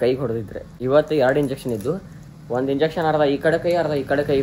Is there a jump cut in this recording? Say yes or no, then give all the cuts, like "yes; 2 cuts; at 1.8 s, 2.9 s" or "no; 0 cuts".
no; 0 cuts